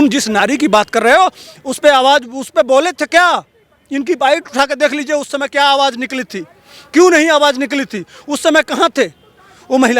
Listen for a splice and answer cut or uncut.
uncut